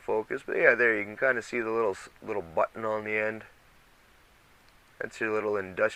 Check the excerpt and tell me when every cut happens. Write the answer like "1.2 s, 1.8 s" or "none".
none